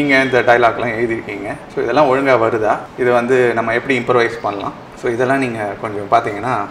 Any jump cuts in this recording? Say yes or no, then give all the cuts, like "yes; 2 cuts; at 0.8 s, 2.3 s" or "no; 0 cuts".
yes; 1 cut; at 2.9 s